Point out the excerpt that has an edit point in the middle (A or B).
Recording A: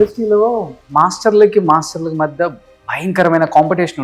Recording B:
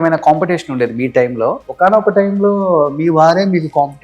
B